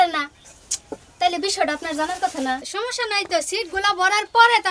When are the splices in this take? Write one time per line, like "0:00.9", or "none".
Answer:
0:02.7